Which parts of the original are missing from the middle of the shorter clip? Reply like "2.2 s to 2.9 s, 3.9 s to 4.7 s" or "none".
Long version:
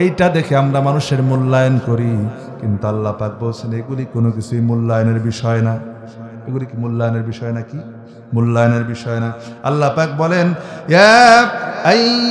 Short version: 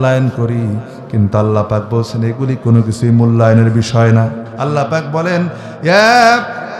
5.9 s to 9.5 s